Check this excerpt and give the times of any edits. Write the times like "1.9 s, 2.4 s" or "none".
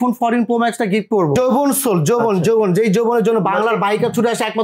1.4 s